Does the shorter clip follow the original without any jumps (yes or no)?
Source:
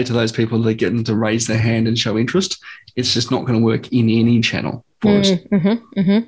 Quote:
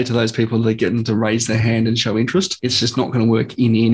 no